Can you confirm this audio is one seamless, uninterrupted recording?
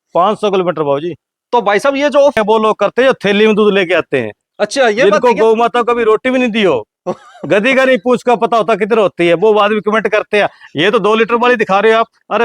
no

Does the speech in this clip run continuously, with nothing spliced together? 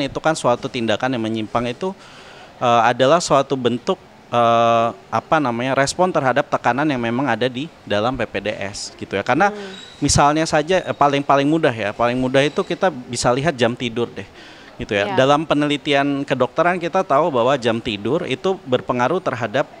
yes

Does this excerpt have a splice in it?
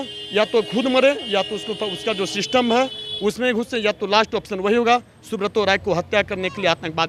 no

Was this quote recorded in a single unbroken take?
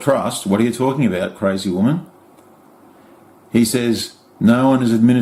yes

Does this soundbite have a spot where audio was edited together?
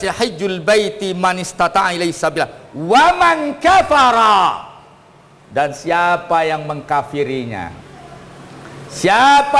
no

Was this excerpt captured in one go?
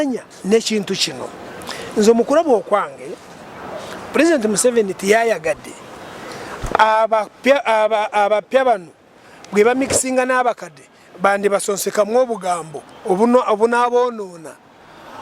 yes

